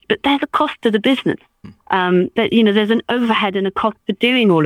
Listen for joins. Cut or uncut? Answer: uncut